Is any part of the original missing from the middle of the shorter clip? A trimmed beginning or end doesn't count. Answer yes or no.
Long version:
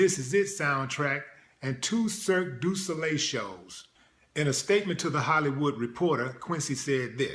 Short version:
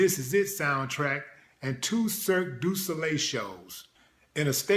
no